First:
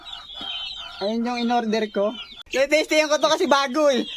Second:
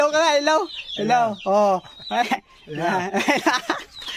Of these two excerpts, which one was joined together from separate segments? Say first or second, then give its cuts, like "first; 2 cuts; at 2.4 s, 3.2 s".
first; 1 cut; at 2.4 s